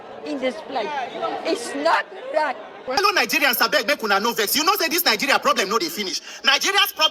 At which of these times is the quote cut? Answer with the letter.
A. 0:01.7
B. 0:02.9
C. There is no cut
B